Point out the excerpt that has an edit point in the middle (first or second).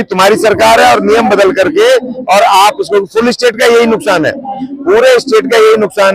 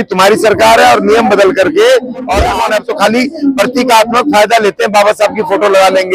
second